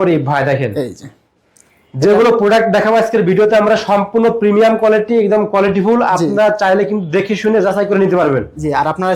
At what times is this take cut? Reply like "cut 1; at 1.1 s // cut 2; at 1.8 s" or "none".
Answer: none